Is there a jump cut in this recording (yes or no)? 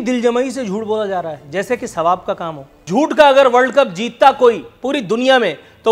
yes